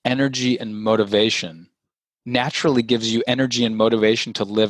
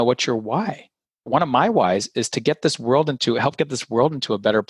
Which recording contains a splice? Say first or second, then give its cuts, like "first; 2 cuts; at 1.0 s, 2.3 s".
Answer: second; 1 cut; at 1.3 s